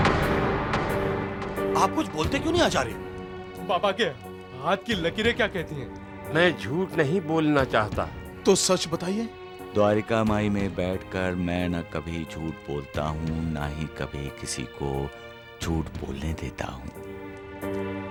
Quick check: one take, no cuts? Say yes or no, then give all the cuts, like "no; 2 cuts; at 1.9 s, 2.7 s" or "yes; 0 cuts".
yes; 0 cuts